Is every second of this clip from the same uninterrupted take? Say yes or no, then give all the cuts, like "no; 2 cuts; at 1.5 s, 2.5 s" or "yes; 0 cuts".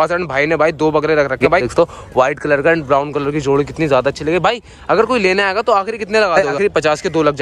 no; 2 cuts; at 1.6 s, 6.5 s